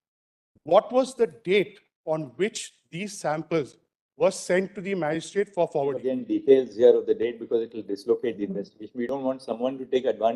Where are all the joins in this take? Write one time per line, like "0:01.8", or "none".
0:06.1